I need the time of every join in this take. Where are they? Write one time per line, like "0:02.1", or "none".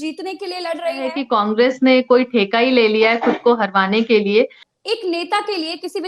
0:01.2
0:04.6